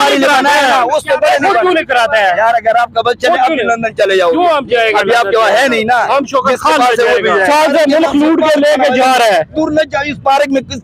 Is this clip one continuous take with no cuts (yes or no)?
no